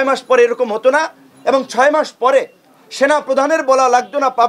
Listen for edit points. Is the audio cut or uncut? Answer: uncut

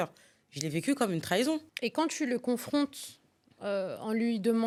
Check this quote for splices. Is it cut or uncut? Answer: uncut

